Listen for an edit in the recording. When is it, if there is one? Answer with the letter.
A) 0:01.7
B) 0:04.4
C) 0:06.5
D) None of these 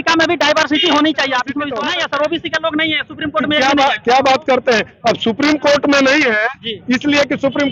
A